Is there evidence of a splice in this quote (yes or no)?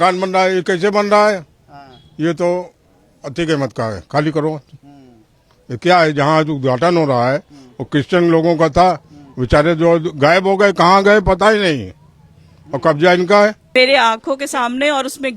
yes